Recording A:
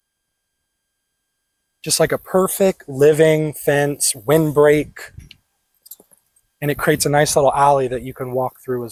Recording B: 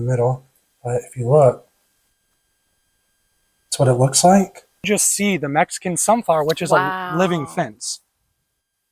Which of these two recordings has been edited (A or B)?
B